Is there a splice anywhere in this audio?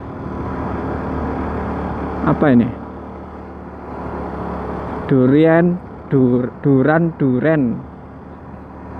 no; 0 cuts

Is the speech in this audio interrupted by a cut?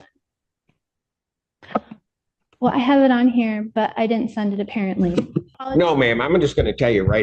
yes; 1 cut; at 5.6 s

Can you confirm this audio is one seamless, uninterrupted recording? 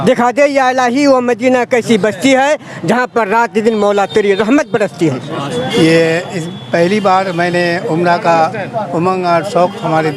no; 1 cut; at 5.5 s

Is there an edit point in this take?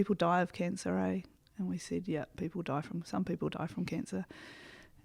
no; 0 cuts

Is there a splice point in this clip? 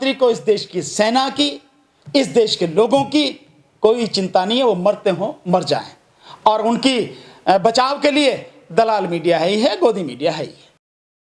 no; 0 cuts

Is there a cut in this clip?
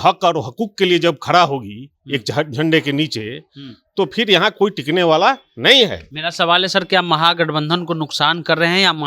no; 0 cuts

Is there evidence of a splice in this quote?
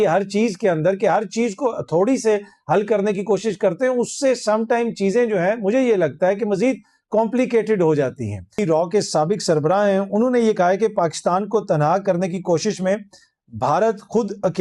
yes; 1 cut; at 8.5 s

